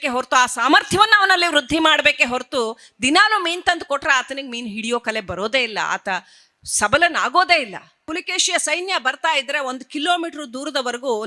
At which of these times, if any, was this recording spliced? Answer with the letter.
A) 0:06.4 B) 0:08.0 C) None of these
B